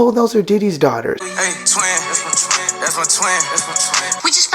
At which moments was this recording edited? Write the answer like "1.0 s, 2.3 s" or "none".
1.2 s